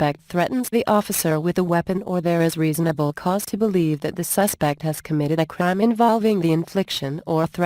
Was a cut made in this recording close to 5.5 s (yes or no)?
yes